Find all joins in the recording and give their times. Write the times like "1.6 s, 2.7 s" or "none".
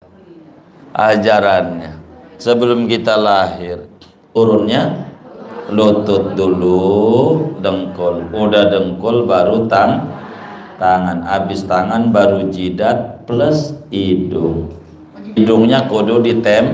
4.4 s, 15.4 s